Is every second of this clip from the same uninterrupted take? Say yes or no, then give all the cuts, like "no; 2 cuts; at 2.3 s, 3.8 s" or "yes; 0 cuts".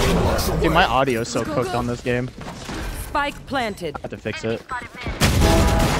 yes; 0 cuts